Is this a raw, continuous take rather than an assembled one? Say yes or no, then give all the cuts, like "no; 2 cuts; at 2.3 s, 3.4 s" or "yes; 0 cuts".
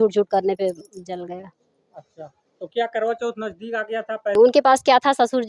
no; 1 cut; at 4.3 s